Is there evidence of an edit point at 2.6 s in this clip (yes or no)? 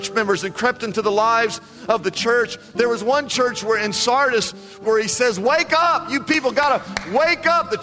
no